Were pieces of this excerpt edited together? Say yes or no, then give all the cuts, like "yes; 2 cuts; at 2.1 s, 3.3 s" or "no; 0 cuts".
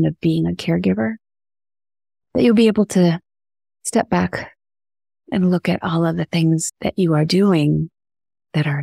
no; 0 cuts